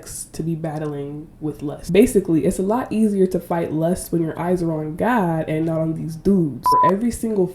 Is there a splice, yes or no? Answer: yes